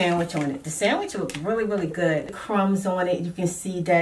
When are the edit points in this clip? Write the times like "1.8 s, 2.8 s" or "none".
2.4 s